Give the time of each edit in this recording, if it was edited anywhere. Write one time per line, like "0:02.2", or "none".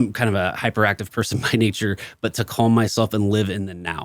none